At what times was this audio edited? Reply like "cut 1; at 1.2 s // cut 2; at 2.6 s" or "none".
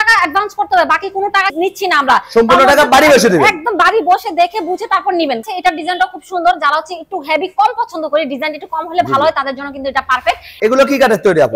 cut 1; at 1.5 s // cut 2; at 5.4 s // cut 3; at 10.5 s